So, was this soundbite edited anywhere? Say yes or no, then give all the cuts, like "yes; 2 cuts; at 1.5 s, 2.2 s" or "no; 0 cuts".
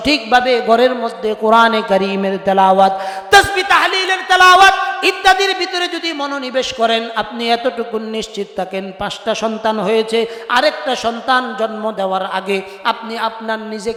no; 0 cuts